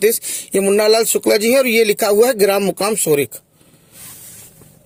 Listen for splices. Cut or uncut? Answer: uncut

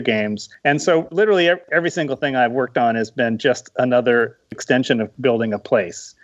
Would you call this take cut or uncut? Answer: cut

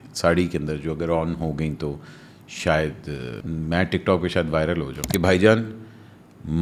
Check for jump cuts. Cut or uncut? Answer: cut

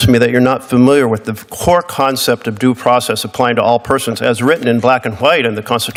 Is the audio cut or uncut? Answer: uncut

